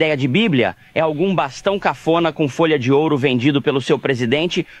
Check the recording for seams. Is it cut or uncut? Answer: uncut